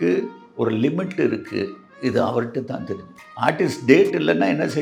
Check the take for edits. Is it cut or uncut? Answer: uncut